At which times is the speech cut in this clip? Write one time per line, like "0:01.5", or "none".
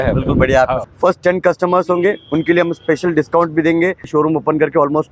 0:00.8
0:04.1